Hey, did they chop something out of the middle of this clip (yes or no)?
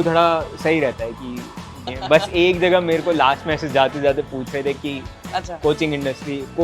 yes